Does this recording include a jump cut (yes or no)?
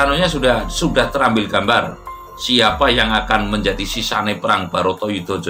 no